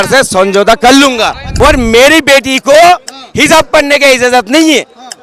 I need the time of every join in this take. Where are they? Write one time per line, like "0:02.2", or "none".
0:01.4